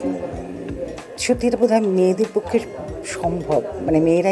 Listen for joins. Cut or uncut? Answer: uncut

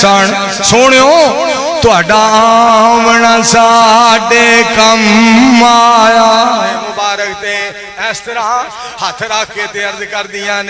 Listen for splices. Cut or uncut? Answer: cut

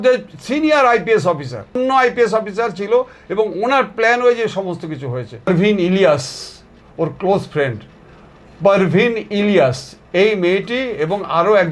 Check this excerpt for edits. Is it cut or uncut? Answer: cut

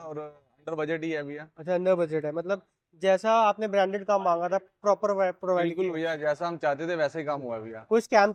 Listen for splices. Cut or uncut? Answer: uncut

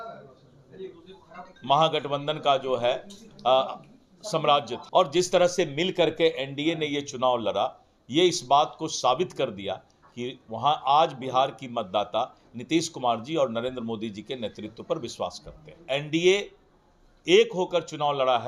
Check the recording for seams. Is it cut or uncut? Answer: cut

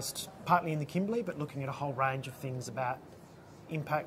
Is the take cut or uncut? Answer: cut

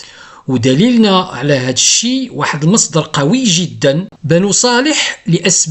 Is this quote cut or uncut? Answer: cut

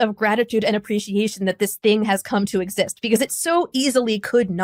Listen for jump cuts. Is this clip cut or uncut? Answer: uncut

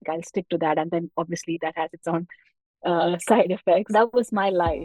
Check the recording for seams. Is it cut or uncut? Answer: cut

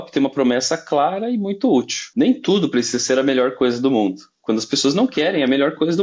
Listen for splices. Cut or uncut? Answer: cut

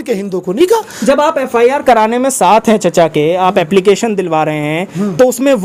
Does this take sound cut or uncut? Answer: uncut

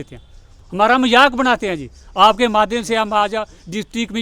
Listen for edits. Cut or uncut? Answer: uncut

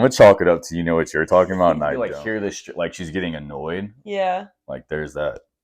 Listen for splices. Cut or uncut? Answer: cut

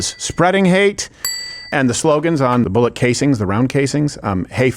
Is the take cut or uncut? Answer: cut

